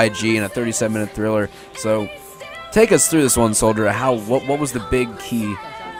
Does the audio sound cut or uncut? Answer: uncut